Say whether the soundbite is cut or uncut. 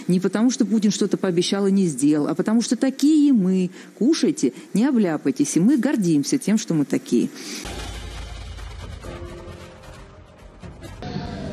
uncut